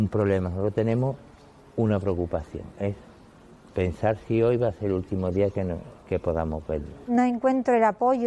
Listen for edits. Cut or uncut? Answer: cut